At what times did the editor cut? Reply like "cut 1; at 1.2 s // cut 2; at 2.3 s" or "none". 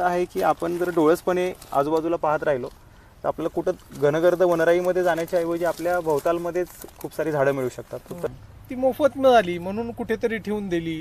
cut 1; at 8.3 s

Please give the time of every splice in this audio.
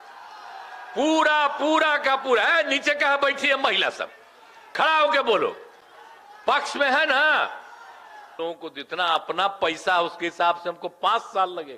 cut 1; at 8.3 s

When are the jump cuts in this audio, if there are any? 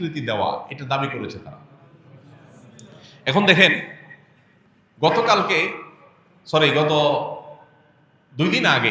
none

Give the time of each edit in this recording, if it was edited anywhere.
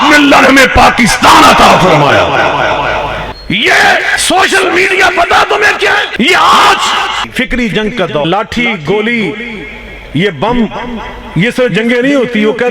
cut 1; at 3.3 s // cut 2; at 4.1 s // cut 3; at 6.1 s // cut 4; at 7.3 s // cut 5; at 8.2 s

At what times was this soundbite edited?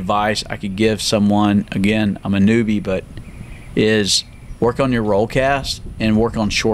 none

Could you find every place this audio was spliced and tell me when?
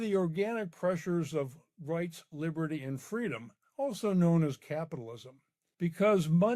cut 1; at 5.3 s

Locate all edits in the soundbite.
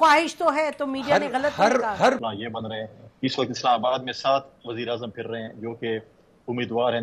cut 1; at 2.2 s

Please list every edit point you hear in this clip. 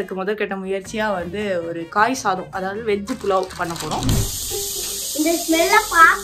cut 1; at 4.3 s

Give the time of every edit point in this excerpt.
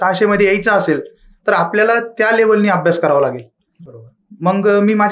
none

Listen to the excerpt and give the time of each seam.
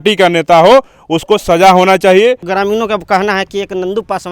cut 1; at 2.5 s

